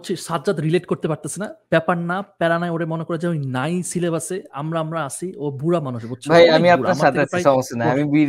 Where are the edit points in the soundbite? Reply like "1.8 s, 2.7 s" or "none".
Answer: none